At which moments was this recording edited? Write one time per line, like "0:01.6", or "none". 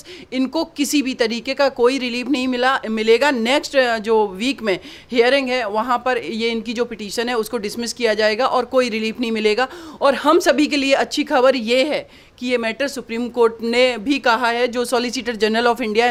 none